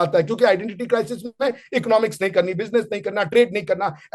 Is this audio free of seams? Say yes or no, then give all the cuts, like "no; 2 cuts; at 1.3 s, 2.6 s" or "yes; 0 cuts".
yes; 0 cuts